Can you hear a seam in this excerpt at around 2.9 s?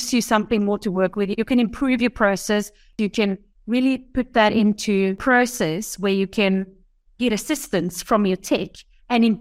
yes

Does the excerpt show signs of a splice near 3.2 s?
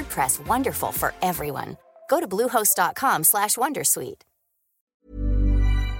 no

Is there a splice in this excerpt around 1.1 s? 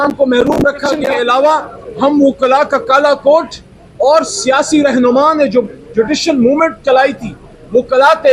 yes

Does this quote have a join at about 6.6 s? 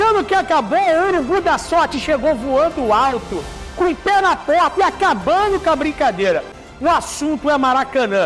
yes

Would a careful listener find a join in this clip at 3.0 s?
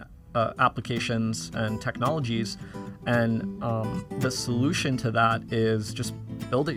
no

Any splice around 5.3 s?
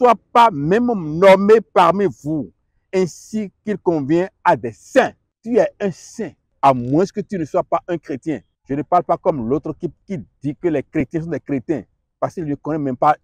yes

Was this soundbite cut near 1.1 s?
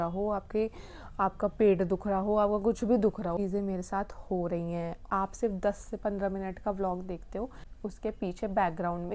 no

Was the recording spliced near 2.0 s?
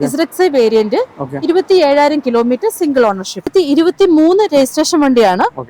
no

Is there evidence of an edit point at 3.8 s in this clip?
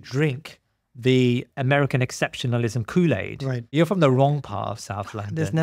yes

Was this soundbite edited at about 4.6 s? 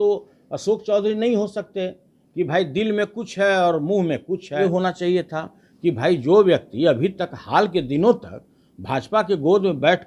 yes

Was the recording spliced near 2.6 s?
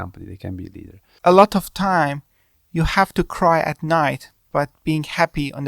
no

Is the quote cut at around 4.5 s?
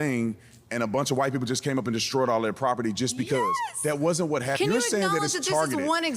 yes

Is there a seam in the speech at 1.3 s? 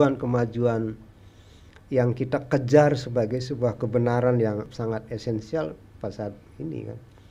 no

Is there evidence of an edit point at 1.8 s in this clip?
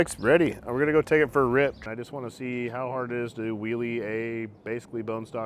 yes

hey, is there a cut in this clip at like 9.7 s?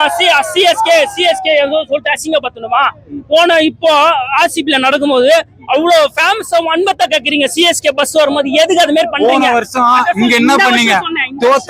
no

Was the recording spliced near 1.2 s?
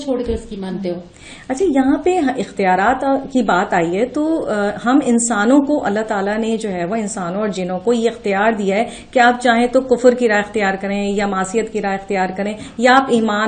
no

